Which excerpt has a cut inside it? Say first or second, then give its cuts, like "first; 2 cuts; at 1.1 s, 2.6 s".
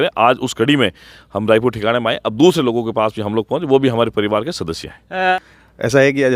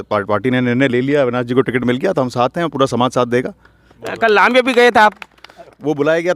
first; 1 cut; at 5.3 s